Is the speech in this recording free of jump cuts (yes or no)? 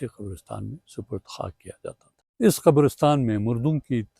no